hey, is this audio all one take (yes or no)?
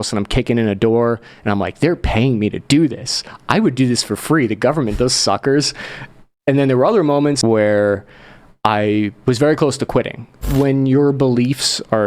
no